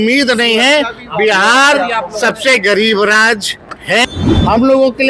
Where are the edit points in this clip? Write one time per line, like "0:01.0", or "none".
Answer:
0:04.0